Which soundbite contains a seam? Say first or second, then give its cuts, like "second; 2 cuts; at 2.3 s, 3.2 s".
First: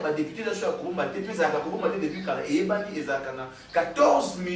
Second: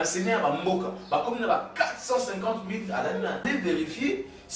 second; 1 cut; at 3.4 s